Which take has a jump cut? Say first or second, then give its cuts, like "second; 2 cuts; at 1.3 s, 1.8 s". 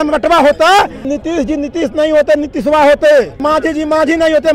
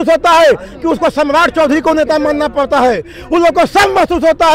first; 2 cuts; at 1.1 s, 3.4 s